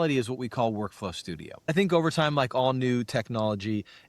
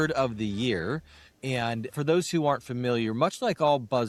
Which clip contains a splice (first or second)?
first